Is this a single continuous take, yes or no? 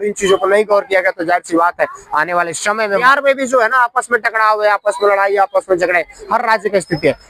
no